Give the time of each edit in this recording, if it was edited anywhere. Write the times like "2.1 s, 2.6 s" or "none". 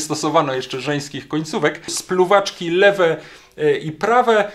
2.0 s